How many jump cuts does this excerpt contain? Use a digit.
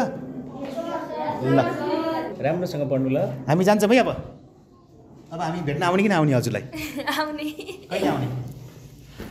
0